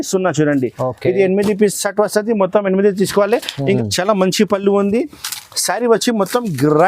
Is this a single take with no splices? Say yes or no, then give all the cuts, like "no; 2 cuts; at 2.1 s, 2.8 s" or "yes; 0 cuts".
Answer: no; 1 cut; at 3.8 s